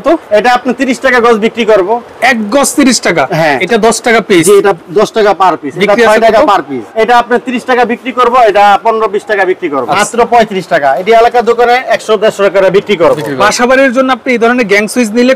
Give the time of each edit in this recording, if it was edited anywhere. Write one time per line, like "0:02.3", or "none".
0:03.6
0:06.8
0:09.9
0:13.4